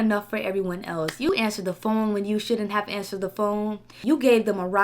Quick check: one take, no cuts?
no; 2 cuts; at 1.3 s, 3.9 s

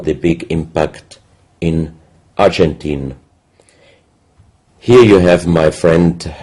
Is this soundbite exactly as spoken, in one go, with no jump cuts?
yes; 0 cuts

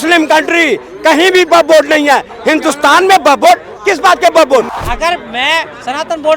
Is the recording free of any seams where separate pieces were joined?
no; 1 cut; at 4.7 s

